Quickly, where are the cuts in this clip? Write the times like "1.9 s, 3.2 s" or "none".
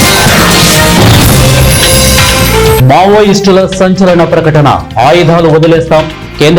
none